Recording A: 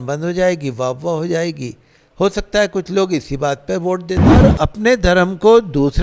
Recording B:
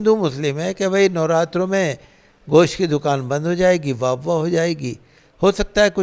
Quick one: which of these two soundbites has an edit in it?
A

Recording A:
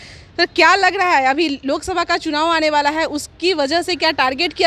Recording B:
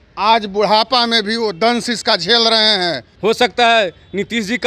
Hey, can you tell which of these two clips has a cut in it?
B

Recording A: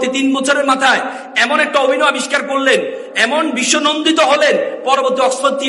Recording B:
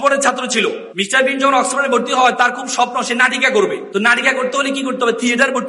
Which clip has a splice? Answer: B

